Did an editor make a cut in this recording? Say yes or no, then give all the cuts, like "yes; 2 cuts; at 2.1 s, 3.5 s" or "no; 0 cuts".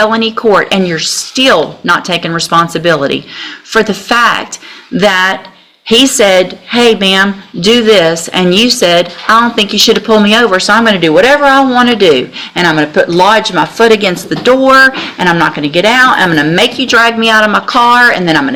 no; 0 cuts